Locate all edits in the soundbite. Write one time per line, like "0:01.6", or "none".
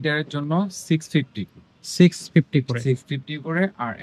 none